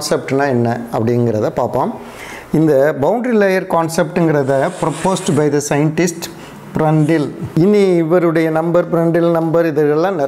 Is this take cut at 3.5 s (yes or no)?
no